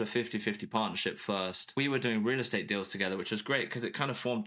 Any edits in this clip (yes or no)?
yes